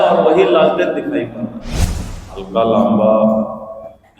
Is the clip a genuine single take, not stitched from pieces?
no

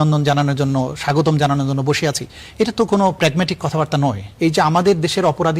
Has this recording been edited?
yes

